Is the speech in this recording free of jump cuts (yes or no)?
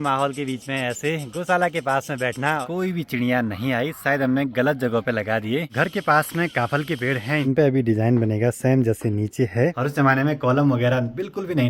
no